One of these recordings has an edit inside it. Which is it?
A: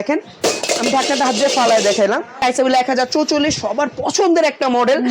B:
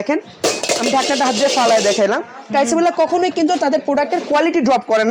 A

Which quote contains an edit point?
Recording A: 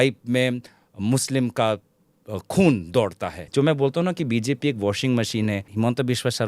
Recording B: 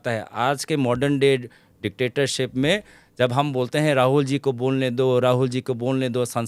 A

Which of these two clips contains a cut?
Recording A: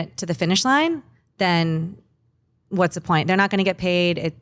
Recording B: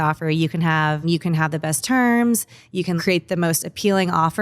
B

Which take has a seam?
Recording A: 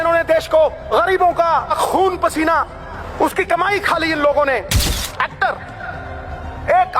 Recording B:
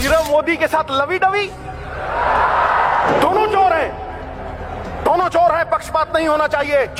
A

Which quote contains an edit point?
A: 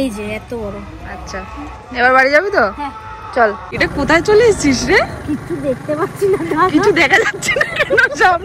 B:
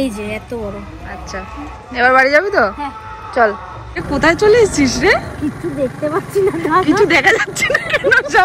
A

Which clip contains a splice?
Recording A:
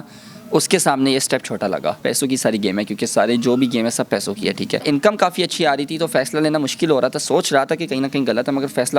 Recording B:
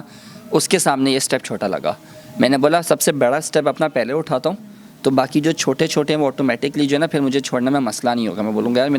A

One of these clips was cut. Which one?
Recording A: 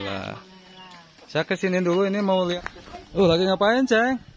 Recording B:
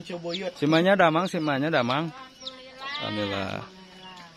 A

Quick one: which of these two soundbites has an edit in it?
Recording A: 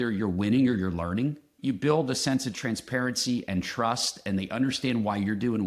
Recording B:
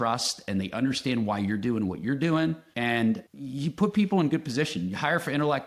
A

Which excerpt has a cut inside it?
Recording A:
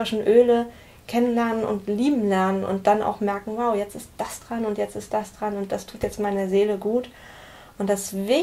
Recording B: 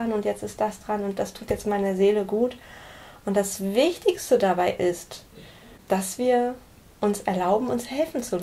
B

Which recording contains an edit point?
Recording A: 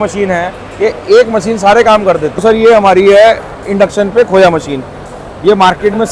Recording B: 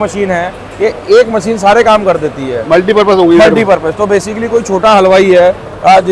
A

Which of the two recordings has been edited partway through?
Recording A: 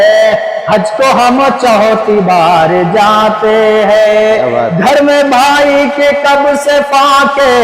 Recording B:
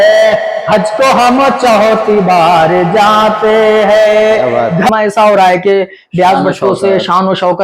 B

